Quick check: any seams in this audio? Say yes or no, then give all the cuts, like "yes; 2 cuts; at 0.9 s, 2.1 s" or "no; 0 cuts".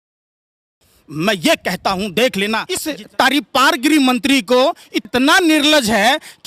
yes; 2 cuts; at 2.8 s, 4.9 s